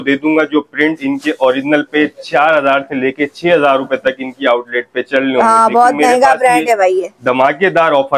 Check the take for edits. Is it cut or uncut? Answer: uncut